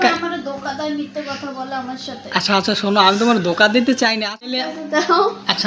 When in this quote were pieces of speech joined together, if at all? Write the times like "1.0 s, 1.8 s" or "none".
4.6 s